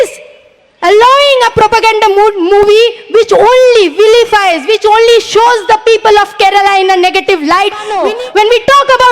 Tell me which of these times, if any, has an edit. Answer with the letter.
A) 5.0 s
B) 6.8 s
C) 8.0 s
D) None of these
C